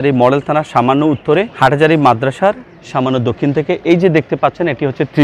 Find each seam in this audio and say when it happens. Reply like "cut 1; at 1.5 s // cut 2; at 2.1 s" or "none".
cut 1; at 1.5 s